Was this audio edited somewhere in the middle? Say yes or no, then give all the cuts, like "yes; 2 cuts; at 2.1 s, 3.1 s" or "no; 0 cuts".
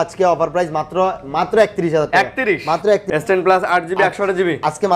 yes; 1 cut; at 3.0 s